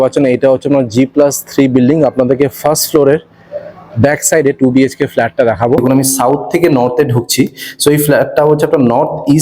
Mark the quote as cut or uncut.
cut